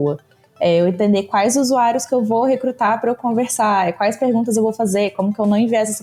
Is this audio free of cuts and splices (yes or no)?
yes